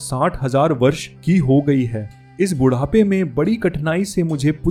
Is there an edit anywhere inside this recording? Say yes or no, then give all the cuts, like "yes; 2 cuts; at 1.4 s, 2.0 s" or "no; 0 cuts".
no; 0 cuts